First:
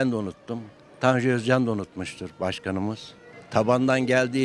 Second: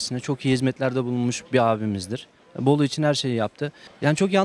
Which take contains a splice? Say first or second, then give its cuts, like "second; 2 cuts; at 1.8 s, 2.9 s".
first; 1 cut; at 3.3 s